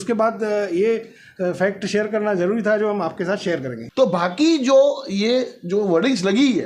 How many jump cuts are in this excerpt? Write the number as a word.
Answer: one